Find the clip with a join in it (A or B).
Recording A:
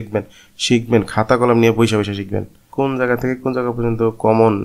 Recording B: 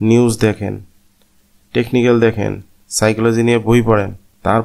A